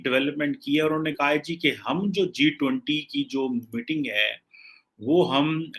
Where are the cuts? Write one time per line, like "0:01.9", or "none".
none